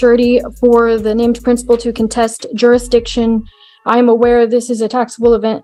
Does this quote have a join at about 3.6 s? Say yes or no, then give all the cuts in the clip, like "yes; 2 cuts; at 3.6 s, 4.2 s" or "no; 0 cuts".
no; 0 cuts